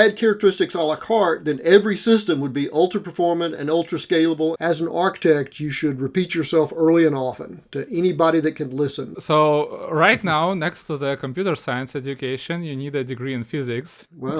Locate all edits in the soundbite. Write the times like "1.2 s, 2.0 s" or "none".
4.6 s, 9.1 s